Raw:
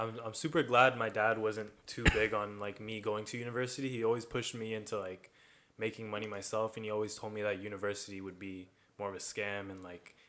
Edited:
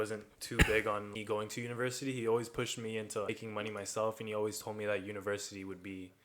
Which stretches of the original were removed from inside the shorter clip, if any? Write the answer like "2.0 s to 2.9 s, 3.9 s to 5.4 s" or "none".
2.6 s to 2.9 s, 5.0 s to 5.8 s